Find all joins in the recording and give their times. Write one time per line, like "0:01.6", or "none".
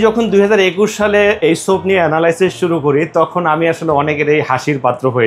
none